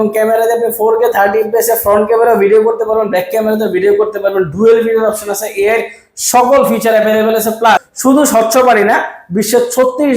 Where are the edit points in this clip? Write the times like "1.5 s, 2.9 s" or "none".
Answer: 7.9 s